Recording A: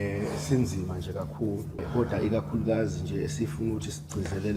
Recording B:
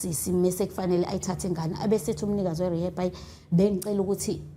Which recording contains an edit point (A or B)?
A